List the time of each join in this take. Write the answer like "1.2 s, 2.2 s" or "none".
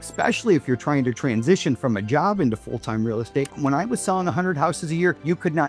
3.5 s